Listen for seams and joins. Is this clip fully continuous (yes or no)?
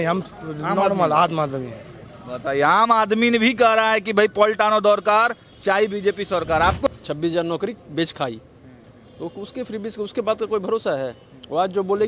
no